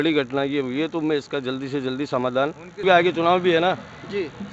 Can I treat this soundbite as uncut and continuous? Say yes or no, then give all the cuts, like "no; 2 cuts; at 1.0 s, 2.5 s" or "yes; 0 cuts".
no; 1 cut; at 2.8 s